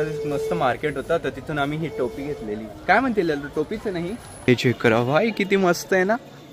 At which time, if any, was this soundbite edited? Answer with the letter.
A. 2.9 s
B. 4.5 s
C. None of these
B